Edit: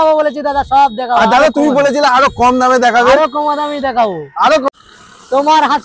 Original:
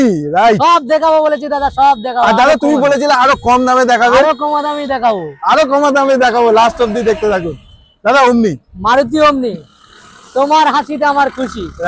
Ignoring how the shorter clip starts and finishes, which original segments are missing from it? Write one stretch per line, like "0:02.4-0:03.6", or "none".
0:05.7-0:09.7